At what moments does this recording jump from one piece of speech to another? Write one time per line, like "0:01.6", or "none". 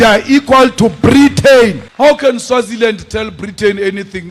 0:01.8